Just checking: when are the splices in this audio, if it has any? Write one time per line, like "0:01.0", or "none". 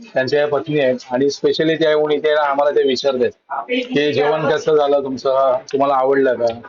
none